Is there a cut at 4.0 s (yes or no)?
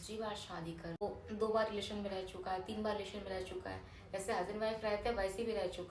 no